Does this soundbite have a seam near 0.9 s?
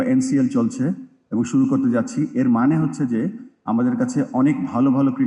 no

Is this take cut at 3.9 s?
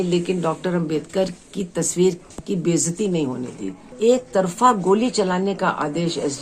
yes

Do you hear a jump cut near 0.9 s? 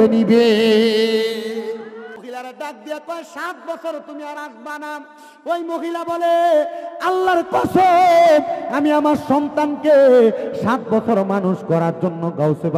no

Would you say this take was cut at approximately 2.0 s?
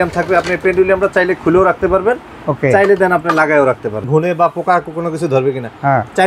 no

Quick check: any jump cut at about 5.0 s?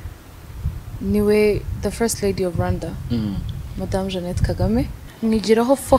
yes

